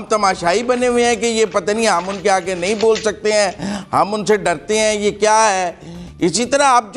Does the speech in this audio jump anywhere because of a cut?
no; 0 cuts

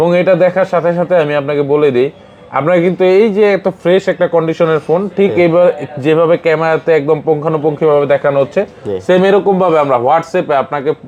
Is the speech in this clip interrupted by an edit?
no; 0 cuts

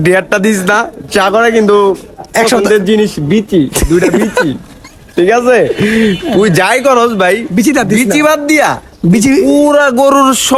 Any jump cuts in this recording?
no; 0 cuts

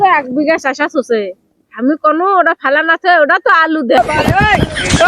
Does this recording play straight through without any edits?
no; 1 cut; at 4.0 s

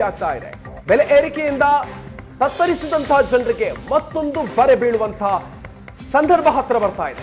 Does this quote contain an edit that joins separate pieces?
no; 0 cuts

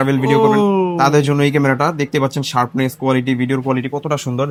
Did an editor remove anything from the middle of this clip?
no; 0 cuts

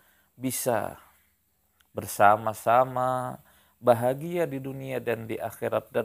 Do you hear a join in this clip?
no; 0 cuts

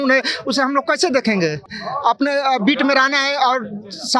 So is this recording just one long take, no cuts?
no; 1 cut; at 1.8 s

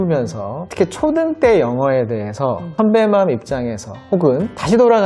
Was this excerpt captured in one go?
yes; 0 cuts

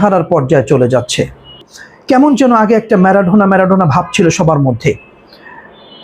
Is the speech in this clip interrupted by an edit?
yes; 1 cut; at 1.6 s

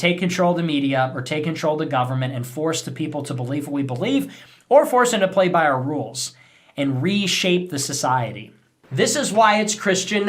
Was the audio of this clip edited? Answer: yes; 1 cut; at 8.7 s

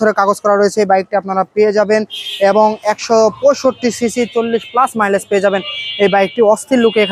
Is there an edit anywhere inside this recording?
no; 0 cuts

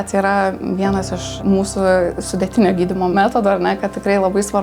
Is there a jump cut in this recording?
yes; 2 cuts; at 1.3 s, 3.1 s

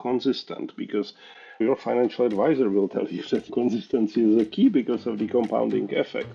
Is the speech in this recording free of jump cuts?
no; 2 cuts; at 1.6 s, 3.5 s

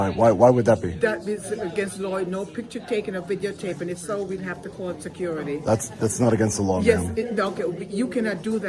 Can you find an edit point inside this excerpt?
no; 0 cuts

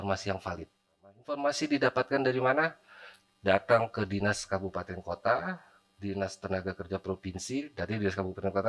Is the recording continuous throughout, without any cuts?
no; 1 cut; at 1.3 s

